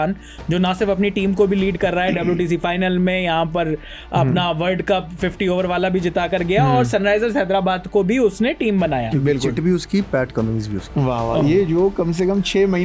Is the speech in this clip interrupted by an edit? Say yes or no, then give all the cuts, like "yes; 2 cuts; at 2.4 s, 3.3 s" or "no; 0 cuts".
no; 0 cuts